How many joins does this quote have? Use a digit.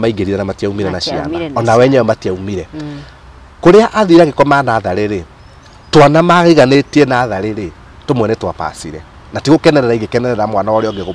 0